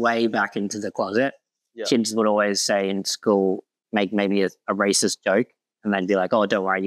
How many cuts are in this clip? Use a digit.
1